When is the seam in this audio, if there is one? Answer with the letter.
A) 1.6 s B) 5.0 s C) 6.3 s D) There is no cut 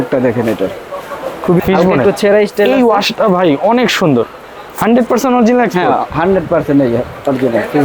A